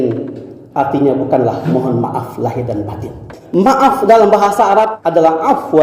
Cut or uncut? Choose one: cut